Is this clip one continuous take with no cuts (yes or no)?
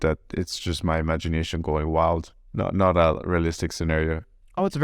no